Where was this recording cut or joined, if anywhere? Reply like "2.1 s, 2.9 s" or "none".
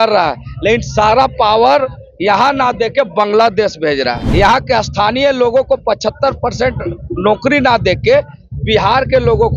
4.2 s